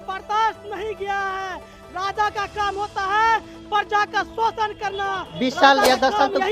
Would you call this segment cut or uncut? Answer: cut